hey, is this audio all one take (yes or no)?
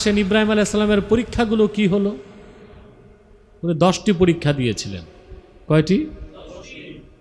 yes